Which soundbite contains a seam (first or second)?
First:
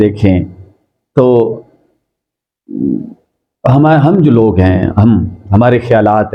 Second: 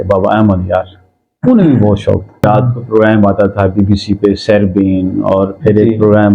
second